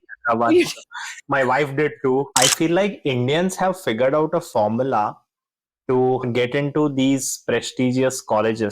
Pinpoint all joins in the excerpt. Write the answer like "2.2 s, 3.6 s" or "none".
2.3 s, 6.2 s